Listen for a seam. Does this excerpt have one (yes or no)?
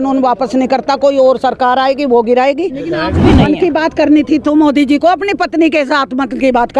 yes